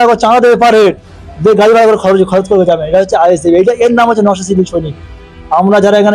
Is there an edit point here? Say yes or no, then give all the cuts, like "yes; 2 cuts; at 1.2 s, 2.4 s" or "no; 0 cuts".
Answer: no; 0 cuts